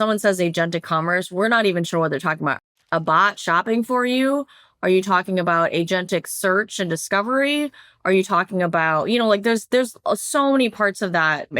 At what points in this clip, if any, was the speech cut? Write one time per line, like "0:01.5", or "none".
0:02.6

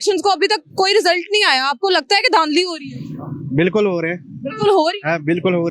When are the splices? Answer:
none

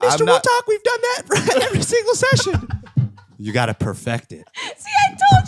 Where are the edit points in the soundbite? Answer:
none

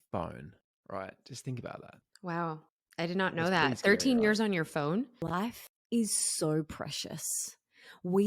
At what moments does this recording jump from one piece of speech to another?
0:05.4

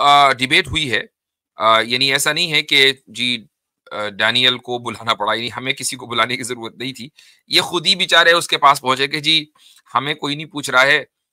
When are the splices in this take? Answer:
none

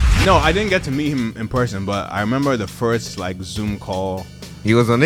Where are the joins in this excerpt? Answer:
none

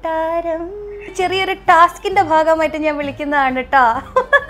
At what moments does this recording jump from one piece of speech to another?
0:01.1

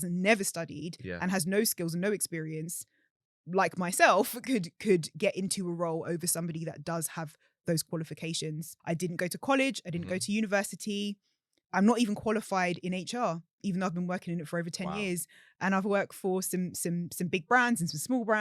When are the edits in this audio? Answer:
0:08.7

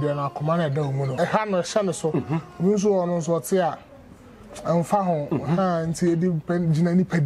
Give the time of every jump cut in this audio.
0:01.1

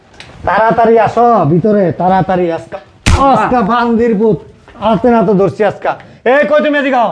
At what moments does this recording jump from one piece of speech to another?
none

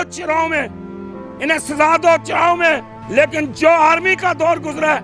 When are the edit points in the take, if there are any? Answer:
0:02.9

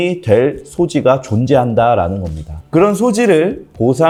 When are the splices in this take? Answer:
none

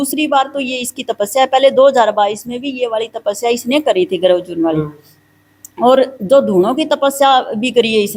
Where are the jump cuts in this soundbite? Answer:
none

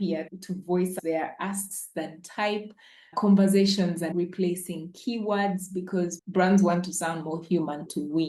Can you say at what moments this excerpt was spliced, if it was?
0:06.2

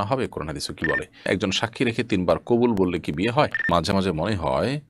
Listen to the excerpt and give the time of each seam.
0:01.2
0:03.7

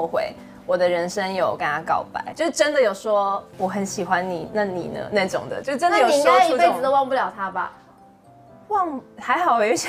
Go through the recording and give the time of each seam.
0:02.3
0:03.5

